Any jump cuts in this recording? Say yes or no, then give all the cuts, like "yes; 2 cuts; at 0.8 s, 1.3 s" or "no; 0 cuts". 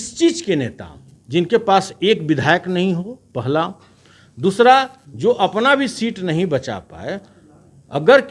no; 0 cuts